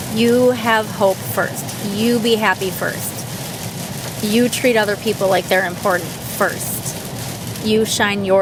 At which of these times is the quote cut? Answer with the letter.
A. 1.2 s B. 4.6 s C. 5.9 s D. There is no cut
D